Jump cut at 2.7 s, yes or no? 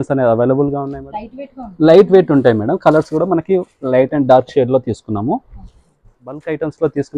no